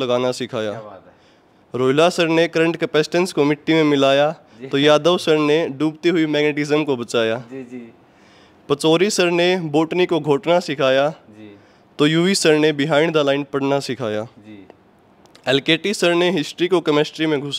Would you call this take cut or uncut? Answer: uncut